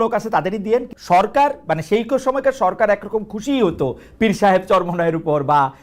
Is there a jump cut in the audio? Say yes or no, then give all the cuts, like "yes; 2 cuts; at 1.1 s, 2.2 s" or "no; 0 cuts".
yes; 1 cut; at 0.9 s